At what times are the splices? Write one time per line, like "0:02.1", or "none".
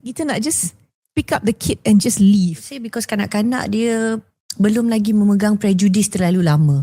0:02.8